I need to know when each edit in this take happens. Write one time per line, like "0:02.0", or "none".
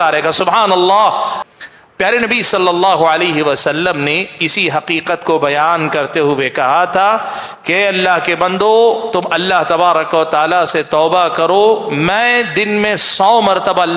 0:01.4